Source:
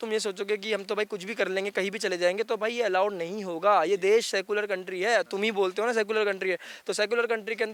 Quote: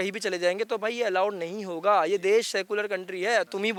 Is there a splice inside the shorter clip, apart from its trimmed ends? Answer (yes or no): no